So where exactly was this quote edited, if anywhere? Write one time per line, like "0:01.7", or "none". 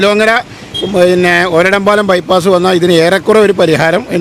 none